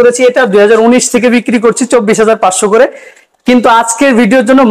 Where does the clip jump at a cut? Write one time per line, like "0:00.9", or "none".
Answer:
none